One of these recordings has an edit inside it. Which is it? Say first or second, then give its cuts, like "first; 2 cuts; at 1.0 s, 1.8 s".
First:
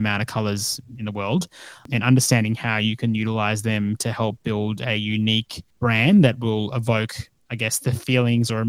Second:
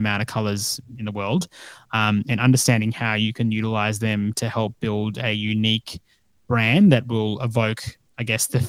first; 2 cuts; at 1.9 s, 5.6 s